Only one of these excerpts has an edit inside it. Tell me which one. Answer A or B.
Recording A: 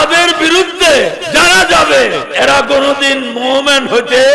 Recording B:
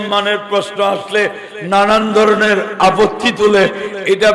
A